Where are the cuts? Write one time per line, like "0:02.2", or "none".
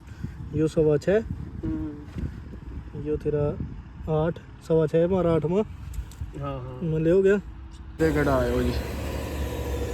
0:07.9